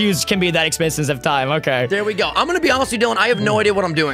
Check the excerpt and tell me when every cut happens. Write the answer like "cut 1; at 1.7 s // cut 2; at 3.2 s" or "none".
none